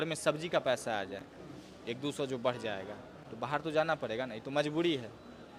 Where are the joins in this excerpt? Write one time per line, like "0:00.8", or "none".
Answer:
none

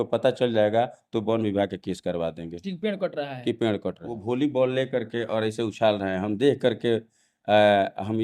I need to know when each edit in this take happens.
0:04.2

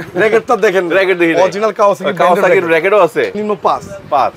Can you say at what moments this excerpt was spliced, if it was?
0:03.3

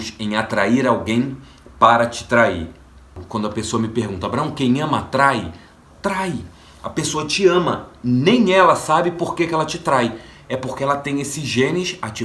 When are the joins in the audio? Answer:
0:03.2

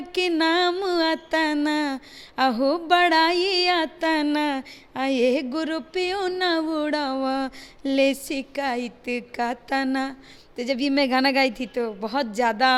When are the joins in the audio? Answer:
none

